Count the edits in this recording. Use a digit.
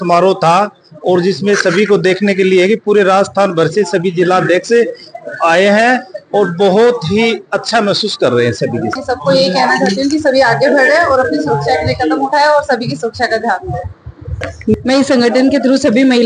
2